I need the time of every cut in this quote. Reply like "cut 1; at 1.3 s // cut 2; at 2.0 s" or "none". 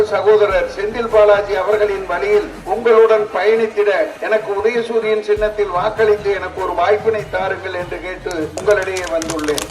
cut 1; at 2.6 s // cut 2; at 4.2 s // cut 3; at 8.6 s